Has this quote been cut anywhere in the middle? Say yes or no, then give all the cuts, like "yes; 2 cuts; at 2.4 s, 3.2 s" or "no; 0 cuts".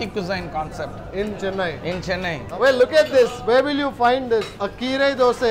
yes; 1 cut; at 2.5 s